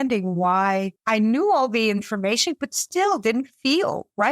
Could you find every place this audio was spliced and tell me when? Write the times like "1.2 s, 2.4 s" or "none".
0.9 s